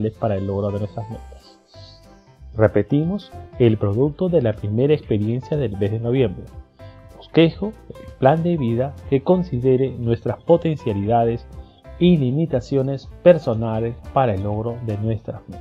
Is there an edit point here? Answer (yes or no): no